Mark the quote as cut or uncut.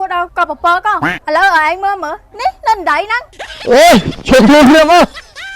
uncut